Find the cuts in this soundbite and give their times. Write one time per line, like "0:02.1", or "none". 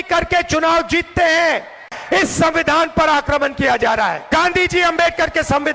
0:01.9
0:04.2